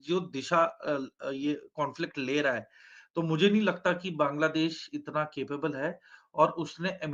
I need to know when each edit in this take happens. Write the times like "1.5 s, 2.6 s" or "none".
none